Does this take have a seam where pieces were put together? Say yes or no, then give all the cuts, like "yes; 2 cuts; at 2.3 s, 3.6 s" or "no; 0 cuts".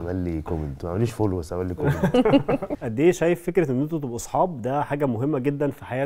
yes; 1 cut; at 2.7 s